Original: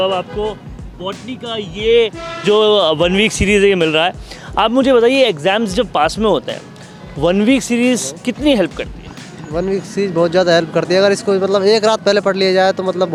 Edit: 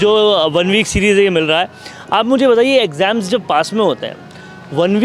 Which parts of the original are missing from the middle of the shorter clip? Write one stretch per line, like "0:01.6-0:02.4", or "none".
none